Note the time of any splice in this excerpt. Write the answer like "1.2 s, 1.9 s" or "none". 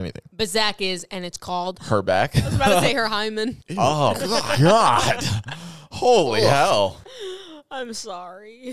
none

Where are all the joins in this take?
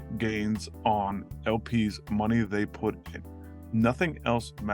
none

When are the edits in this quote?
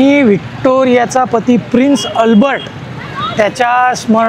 none

